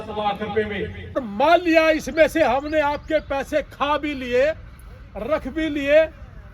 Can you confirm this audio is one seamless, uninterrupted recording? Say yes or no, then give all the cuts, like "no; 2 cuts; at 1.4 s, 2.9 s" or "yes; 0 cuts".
no; 1 cut; at 1.0 s